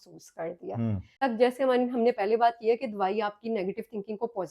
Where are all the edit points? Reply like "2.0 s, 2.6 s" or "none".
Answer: 1.2 s